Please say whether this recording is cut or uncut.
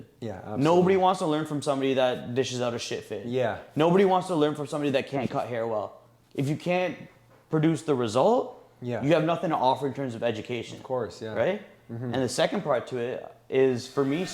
uncut